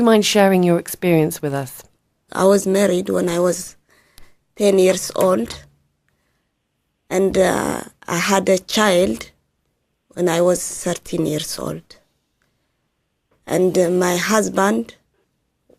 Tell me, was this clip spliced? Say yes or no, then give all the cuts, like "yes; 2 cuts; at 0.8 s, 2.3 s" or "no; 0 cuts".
yes; 1 cut; at 11.0 s